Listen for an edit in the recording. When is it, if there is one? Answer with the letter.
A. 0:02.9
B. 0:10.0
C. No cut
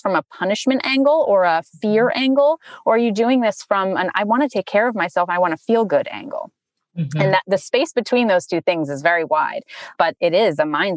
B